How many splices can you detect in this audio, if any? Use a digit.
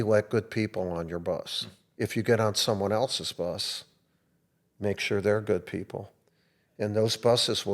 1